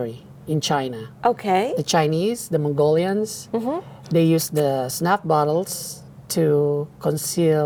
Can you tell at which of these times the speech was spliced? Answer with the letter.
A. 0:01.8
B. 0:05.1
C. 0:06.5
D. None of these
D